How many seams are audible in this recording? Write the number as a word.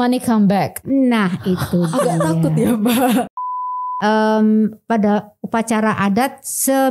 one